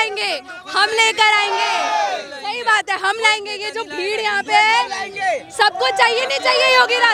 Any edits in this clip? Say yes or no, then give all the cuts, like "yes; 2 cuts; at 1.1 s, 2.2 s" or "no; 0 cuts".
no; 0 cuts